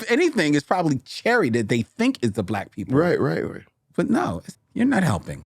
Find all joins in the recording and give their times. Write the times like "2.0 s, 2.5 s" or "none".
4.5 s